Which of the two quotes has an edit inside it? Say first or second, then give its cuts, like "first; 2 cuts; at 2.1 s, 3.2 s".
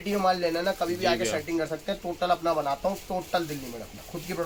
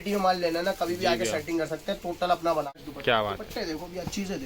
second; 1 cut; at 2.7 s